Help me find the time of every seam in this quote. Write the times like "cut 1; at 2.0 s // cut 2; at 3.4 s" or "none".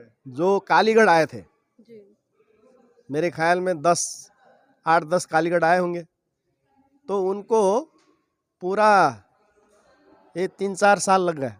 none

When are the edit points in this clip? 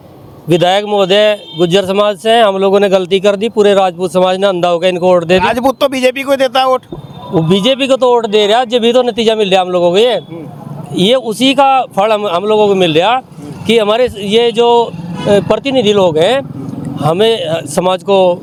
none

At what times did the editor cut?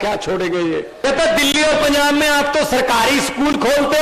cut 1; at 0.9 s

